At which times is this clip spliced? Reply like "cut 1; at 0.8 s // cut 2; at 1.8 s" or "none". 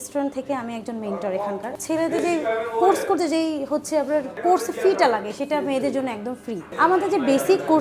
cut 1; at 1.7 s // cut 2; at 4.4 s // cut 3; at 6.7 s